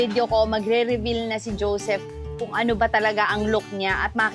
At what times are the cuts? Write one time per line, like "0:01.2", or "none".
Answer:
none